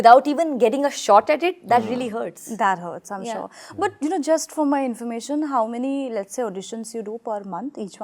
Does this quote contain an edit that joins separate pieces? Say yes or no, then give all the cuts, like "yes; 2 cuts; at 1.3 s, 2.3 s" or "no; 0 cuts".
no; 0 cuts